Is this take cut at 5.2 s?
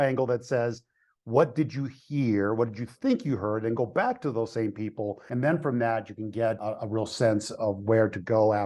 yes; 2 cuts; at 5.2 s, 6.6 s

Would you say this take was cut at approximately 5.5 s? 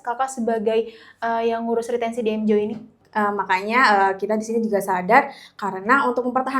no; 1 cut; at 3.0 s

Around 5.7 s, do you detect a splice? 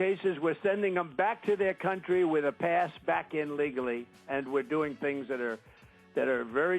yes; 1 cut; at 5.7 s

